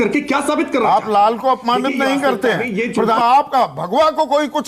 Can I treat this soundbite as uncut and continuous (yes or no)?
no